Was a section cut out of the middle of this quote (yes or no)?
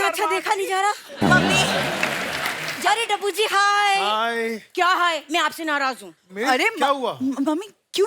yes